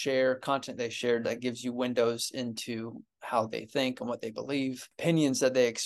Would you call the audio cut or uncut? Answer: cut